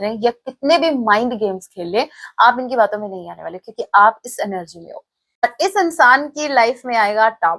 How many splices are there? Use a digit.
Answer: 1